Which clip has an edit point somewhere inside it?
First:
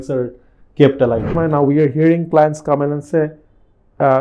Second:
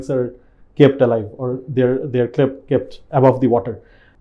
first; 1 cut; at 1.3 s

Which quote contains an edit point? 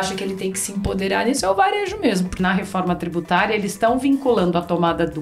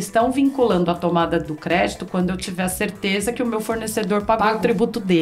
first; 1 cut; at 2.3 s

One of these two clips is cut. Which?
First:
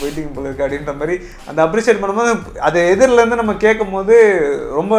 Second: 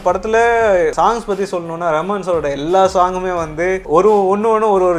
second; 1 cut; at 3.8 s

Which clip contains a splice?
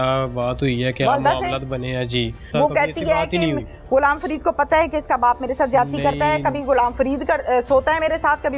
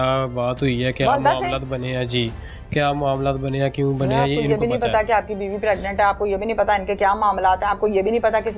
first; 1 cut; at 2.4 s

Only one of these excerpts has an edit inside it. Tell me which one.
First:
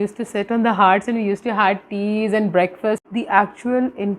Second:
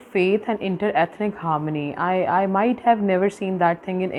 first; 1 cut; at 3.1 s

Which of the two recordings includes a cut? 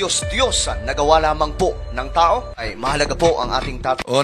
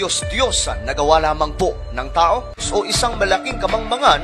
second; 1 cut; at 2.6 s

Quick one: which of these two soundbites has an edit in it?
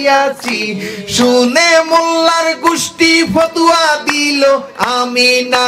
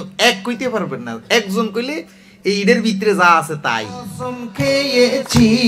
second; 1 cut; at 4.5 s

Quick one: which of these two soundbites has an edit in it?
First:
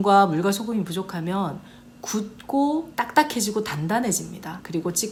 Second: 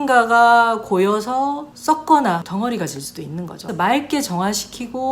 second; 2 cuts; at 2.5 s, 3.7 s

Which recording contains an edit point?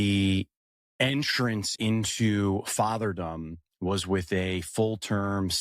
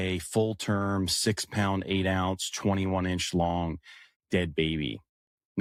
first; 1 cut; at 1.7 s

